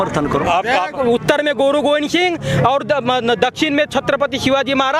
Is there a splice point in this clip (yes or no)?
yes